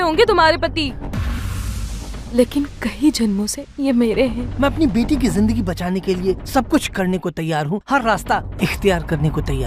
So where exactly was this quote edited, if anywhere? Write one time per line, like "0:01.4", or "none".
0:04.5